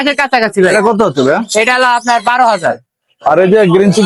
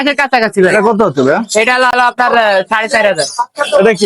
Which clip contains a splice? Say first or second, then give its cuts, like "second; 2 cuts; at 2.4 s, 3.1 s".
second; 1 cut; at 1.9 s